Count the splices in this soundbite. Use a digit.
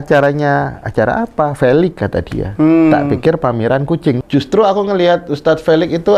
1